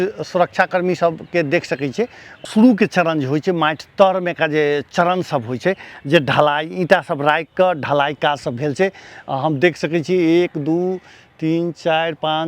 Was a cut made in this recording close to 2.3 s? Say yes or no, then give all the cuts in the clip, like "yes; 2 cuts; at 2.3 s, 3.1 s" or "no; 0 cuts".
yes; 1 cut; at 2.3 s